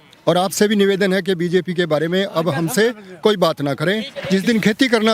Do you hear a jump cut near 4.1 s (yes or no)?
yes